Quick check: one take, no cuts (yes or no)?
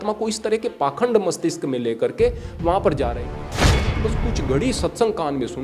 no